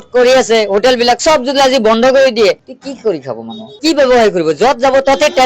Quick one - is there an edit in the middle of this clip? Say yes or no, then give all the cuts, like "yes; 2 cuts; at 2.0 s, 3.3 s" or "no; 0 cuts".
yes; 1 cut; at 1.2 s